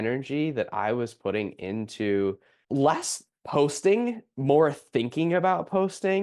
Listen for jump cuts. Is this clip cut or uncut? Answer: uncut